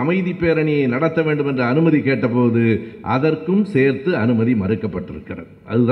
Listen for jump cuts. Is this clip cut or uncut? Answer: uncut